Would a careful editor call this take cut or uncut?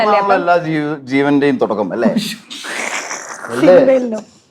uncut